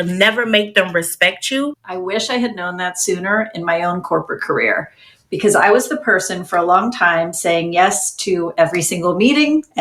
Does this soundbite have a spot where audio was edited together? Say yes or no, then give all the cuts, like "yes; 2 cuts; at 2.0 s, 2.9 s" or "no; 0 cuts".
no; 0 cuts